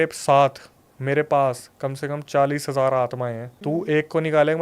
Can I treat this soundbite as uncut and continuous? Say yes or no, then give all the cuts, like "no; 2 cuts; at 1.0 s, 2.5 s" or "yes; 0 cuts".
yes; 0 cuts